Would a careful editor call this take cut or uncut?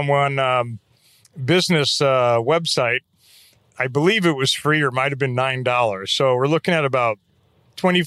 uncut